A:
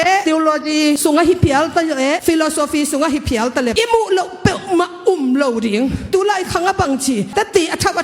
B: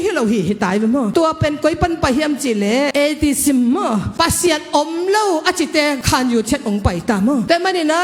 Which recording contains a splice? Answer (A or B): A